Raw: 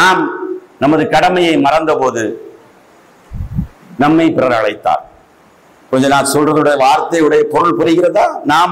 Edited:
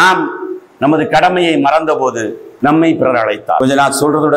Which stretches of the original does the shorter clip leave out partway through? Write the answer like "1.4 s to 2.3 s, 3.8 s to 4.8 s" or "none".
2.4 s to 3.8 s, 5.0 s to 5.9 s